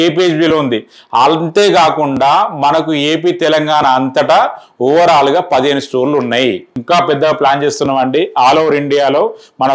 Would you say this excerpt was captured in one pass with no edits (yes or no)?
no